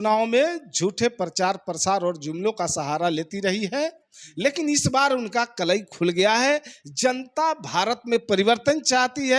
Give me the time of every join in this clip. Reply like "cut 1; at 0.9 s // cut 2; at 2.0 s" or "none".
none